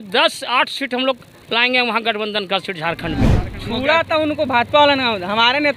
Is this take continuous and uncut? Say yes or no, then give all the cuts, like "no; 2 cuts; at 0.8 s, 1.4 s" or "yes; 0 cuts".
no; 1 cut; at 3.4 s